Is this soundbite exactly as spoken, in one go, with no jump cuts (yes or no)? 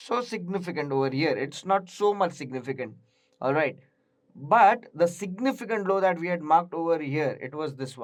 yes